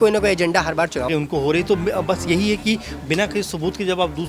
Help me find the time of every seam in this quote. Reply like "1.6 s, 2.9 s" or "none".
1.1 s

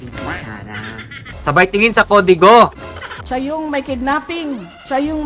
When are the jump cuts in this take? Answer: 1.2 s, 3.2 s

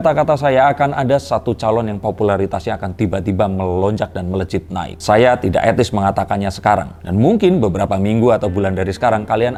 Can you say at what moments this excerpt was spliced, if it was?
none

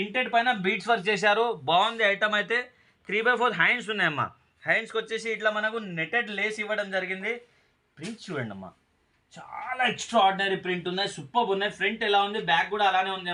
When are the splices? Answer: none

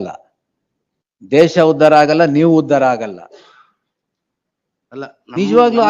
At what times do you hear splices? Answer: none

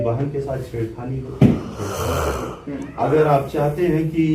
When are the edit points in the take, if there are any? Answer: none

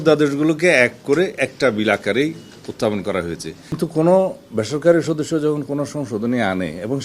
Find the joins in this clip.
3.8 s

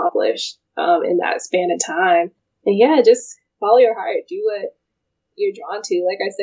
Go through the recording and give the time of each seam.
2.4 s

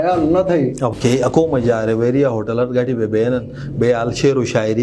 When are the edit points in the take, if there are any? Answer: 0.9 s

